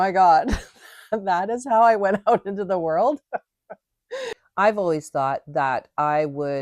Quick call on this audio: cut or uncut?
cut